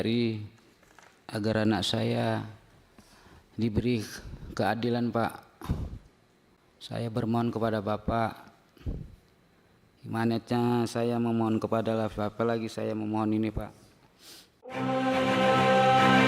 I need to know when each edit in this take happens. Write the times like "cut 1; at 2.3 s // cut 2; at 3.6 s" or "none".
cut 1; at 14.7 s